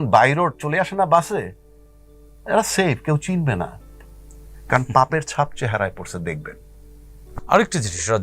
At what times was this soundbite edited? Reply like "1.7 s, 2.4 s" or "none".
none